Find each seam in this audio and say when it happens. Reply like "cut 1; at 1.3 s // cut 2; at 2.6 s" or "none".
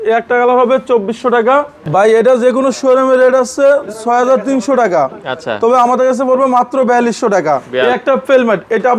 cut 1; at 1.8 s // cut 2; at 7.7 s